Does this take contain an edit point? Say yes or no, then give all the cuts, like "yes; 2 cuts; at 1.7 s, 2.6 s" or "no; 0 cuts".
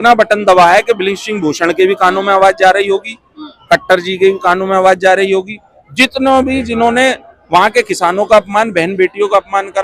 no; 0 cuts